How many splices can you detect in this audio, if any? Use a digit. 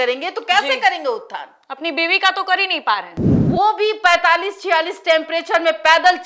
1